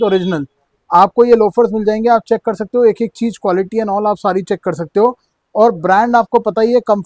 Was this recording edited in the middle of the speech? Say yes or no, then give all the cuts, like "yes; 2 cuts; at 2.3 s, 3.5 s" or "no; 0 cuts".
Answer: no; 0 cuts